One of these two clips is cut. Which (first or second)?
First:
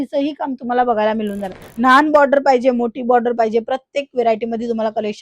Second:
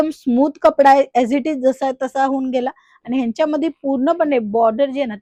first